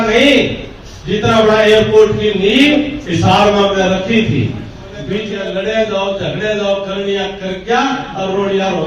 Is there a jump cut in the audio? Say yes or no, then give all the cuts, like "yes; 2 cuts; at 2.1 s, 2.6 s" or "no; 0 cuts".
yes; 1 cut; at 5.2 s